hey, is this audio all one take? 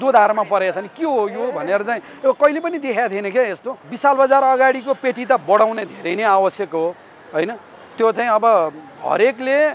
no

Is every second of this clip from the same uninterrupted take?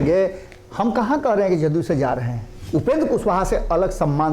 no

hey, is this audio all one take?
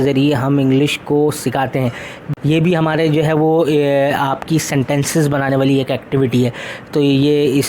no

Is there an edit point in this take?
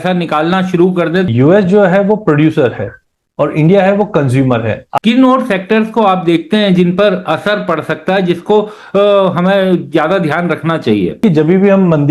yes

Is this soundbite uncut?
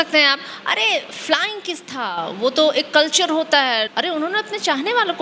no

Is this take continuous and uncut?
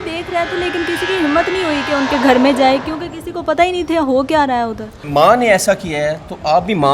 no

